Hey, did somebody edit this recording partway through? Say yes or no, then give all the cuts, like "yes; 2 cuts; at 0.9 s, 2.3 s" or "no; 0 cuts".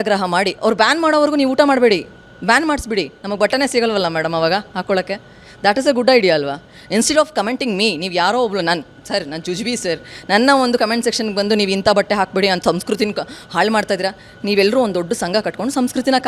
no; 0 cuts